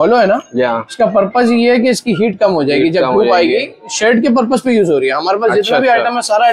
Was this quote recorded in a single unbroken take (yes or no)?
yes